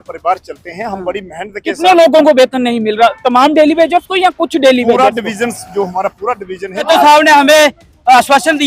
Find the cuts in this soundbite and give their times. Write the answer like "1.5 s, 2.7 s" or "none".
6.8 s